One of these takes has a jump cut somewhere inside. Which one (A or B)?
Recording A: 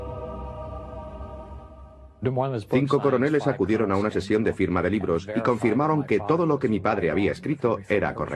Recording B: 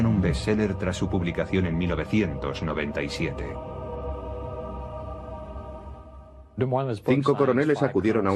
A